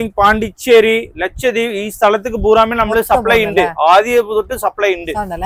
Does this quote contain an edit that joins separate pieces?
no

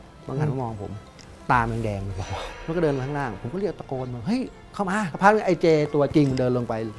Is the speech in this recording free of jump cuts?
no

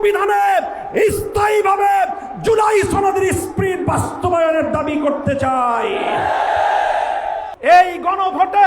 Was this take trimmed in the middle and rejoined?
yes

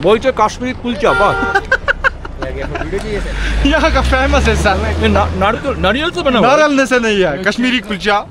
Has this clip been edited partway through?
no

